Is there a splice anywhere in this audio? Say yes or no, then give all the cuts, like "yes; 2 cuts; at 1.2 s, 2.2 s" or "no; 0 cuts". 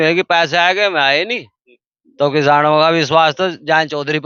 no; 0 cuts